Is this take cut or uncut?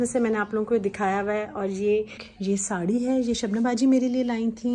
cut